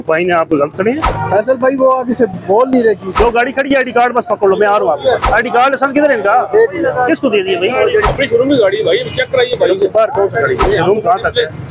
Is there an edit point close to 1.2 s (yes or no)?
yes